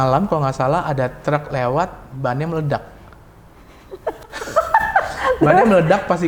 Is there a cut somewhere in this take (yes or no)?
no